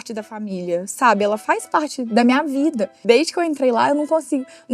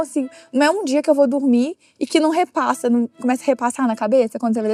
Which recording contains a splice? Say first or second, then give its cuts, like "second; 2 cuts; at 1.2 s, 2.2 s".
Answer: first; 1 cut; at 3.0 s